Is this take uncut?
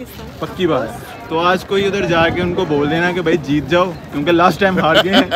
yes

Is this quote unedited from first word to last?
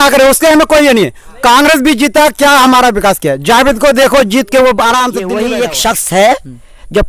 no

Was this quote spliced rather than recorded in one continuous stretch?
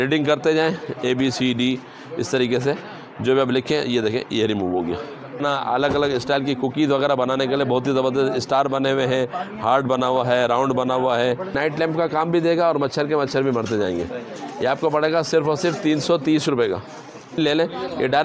yes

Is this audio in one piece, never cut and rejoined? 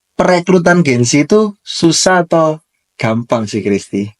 yes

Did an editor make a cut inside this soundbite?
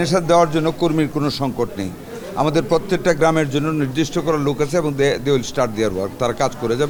no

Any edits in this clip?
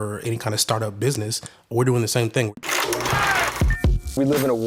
yes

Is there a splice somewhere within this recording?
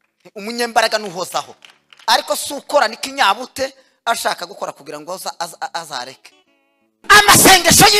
yes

